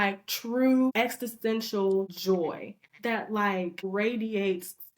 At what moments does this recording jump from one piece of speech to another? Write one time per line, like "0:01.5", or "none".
0:00.9
0:02.1
0:03.9